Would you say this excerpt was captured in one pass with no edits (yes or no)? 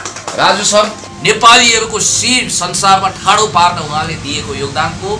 no